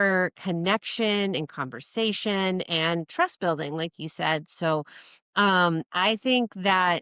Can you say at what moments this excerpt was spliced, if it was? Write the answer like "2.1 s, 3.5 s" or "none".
none